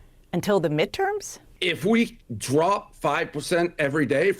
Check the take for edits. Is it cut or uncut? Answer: cut